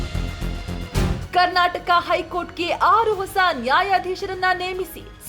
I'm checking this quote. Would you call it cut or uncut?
cut